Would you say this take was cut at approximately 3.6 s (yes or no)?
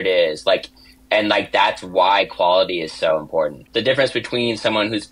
yes